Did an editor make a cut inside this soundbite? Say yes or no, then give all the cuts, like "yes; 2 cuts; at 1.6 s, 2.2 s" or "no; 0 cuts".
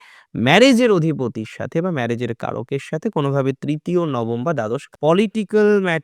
yes; 1 cut; at 4.9 s